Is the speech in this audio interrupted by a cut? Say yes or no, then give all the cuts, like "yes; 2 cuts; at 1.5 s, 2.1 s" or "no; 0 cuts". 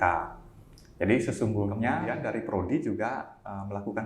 yes; 1 cut; at 2.1 s